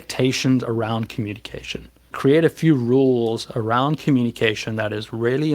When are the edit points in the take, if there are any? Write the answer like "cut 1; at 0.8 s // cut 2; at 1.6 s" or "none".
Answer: cut 1; at 2.1 s